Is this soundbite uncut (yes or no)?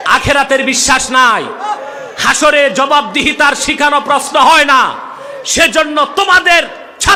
yes